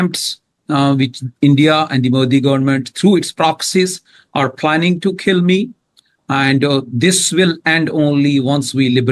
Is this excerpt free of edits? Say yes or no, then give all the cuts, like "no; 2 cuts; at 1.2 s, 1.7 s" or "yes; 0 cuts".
yes; 0 cuts